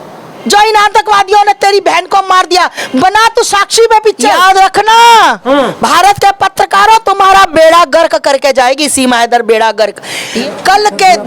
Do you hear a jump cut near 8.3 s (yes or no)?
no